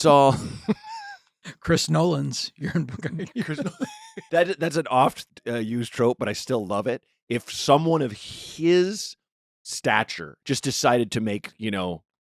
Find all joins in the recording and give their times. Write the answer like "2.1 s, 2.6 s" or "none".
4.2 s, 5.2 s, 10.3 s